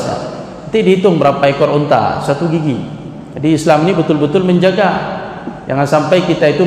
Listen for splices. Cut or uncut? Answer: uncut